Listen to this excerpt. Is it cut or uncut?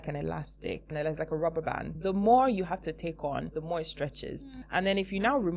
cut